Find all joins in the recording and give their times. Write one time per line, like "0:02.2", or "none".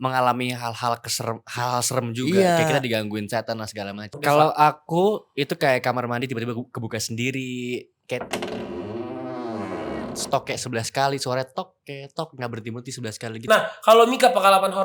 0:04.1
0:13.4